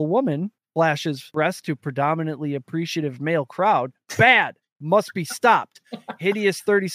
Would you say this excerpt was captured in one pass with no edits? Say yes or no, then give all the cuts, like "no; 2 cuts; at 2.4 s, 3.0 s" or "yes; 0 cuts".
no; 1 cut; at 0.9 s